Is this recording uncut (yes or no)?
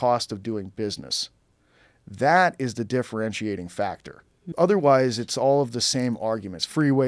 no